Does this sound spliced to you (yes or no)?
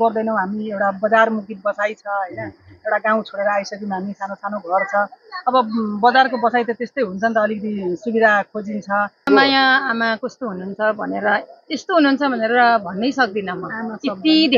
yes